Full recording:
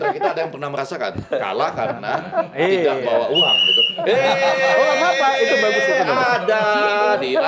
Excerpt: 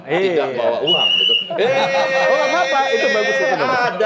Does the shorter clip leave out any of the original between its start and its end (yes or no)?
no